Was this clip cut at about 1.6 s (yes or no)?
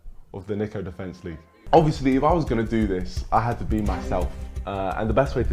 yes